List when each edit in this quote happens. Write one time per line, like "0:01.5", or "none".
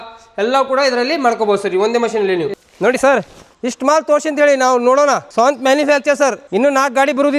0:02.5
0:03.4
0:05.3
0:06.4